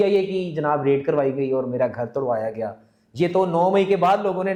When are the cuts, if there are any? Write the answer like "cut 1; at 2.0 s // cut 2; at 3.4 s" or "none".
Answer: none